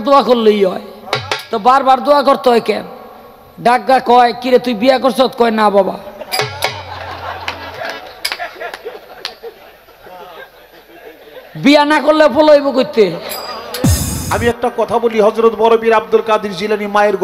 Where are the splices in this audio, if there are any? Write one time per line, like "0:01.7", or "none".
0:14.1